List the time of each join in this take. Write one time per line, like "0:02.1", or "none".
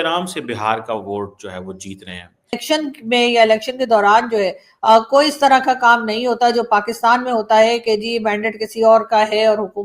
0:02.6